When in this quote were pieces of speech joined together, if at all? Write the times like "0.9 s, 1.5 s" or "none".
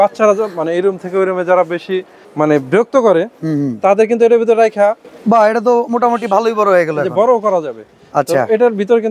none